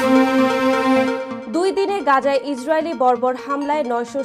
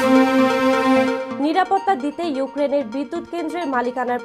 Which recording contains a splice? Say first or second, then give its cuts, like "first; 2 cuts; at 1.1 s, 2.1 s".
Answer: second; 1 cut; at 1.2 s